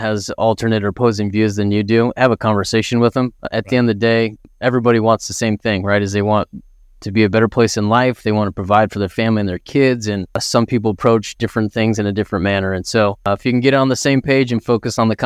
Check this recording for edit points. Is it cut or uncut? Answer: cut